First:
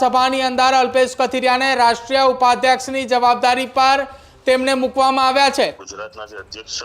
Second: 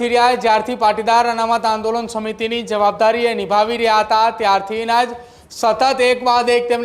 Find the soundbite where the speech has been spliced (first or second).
first